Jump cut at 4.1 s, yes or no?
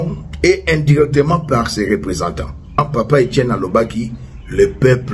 no